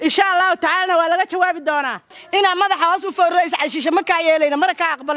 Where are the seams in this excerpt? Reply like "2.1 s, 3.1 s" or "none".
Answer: 2.1 s